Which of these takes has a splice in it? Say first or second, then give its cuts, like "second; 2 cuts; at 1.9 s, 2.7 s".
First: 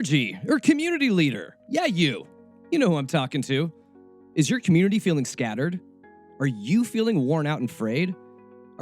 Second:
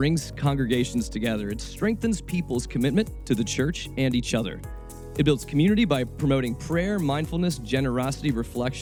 first; 1 cut; at 1.5 s